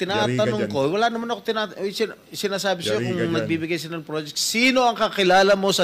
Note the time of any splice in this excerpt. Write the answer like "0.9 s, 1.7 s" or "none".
none